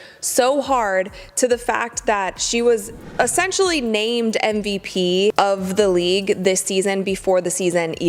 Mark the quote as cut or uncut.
uncut